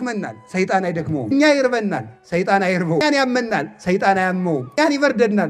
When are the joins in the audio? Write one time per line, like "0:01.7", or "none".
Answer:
0:01.3
0:03.0
0:04.8